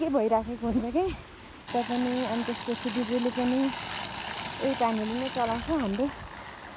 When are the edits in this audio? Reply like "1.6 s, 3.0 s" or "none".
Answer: 1.7 s